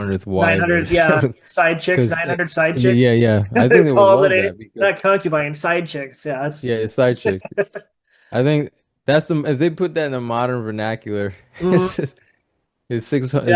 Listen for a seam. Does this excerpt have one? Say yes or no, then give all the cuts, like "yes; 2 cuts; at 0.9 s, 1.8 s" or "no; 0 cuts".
no; 0 cuts